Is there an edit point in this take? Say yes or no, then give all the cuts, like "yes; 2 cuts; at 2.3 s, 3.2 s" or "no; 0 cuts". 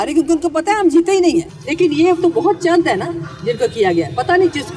yes; 1 cut; at 1.6 s